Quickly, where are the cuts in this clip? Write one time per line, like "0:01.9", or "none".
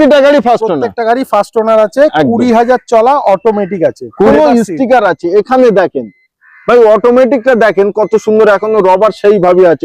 0:04.3